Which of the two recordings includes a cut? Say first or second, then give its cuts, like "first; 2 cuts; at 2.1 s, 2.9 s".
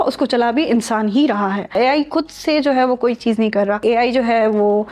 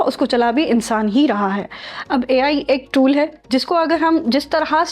first; 2 cuts; at 1.8 s, 3.8 s